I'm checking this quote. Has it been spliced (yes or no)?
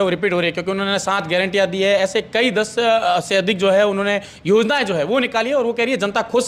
no